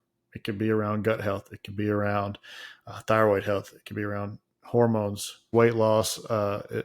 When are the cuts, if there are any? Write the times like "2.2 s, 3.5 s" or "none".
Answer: 5.5 s